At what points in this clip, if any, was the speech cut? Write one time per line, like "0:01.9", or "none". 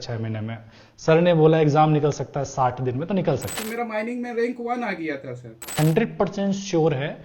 0:03.6
0:05.7